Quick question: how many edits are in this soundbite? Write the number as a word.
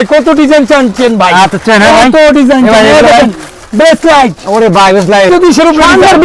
one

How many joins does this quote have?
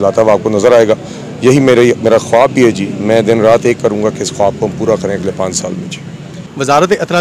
zero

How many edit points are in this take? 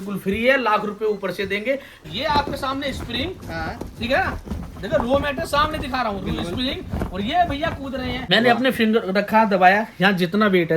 two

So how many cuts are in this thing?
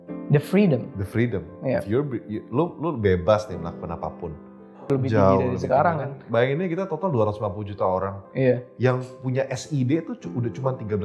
one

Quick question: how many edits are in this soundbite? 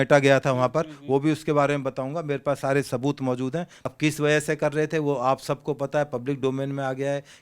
one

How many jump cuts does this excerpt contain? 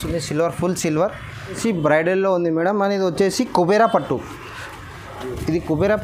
one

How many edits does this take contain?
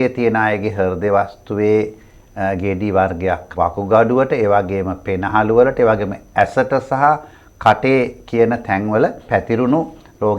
two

